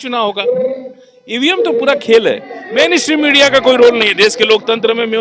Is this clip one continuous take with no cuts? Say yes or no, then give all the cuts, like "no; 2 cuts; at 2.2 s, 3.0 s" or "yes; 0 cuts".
no; 1 cut; at 2.5 s